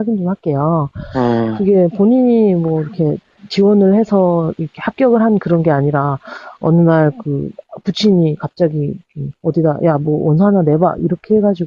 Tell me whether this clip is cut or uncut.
uncut